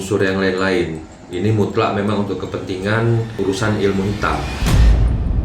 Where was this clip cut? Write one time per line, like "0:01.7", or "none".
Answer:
0:03.3
0:04.5

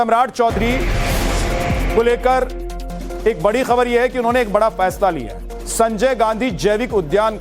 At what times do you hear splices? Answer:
none

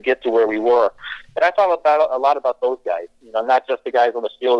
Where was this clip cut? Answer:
none

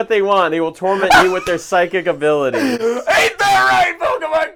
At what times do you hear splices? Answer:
none

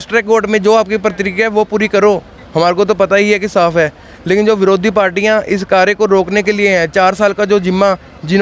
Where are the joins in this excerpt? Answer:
none

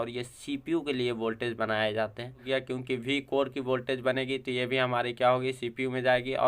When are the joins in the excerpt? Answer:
0:02.4

